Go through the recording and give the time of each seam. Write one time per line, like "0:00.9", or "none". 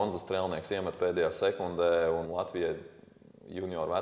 0:02.3